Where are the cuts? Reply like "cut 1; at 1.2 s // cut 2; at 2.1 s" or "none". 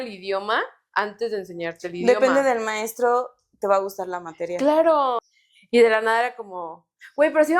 cut 1; at 5.3 s